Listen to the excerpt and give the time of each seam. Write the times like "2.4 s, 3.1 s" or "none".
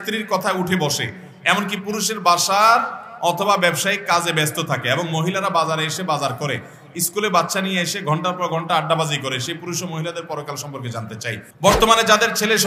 11.5 s